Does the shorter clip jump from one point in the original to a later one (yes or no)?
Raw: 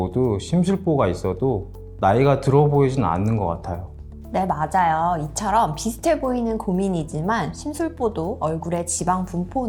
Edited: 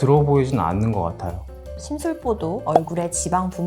yes